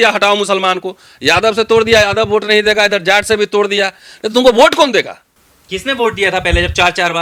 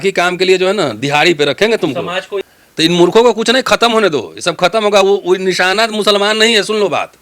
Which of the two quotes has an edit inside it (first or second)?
second